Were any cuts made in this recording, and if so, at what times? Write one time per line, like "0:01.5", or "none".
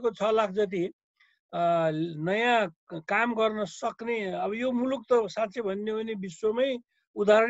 none